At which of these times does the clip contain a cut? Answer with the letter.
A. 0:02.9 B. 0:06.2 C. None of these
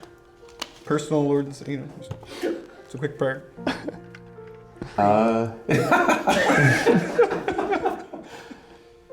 B